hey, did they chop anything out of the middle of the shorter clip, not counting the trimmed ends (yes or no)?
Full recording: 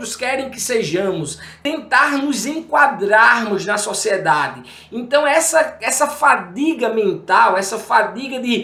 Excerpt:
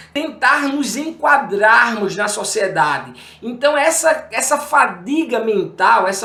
no